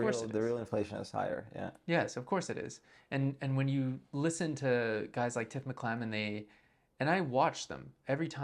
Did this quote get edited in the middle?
no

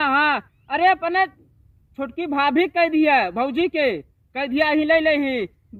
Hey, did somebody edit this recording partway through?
no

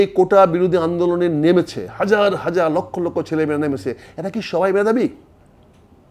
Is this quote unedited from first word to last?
yes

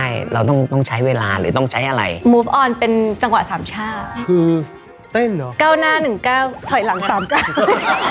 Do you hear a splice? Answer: yes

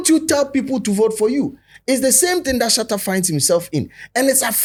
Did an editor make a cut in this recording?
no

